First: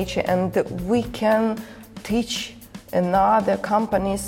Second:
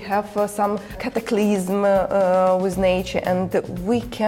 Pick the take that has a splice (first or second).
second